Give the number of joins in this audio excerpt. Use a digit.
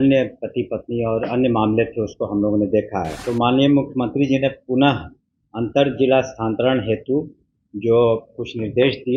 1